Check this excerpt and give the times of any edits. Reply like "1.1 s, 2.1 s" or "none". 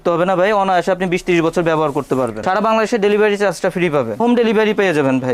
2.4 s, 4.2 s